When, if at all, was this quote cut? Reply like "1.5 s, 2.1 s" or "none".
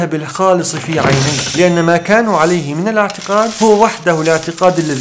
none